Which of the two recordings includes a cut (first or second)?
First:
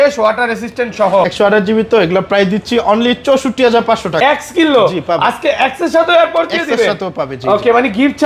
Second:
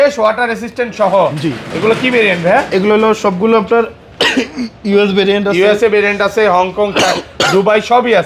first